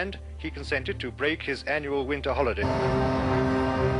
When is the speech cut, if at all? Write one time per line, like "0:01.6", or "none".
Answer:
none